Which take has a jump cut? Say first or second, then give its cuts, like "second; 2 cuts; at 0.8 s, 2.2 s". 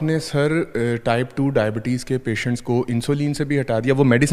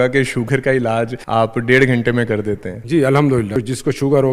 second; 3 cuts; at 1.2 s, 2.7 s, 3.6 s